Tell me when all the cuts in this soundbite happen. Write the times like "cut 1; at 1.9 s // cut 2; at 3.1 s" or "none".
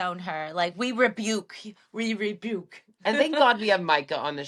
none